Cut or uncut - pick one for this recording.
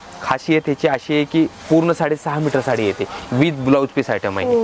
uncut